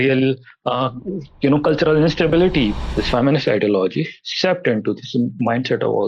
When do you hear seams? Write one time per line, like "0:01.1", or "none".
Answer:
0:02.8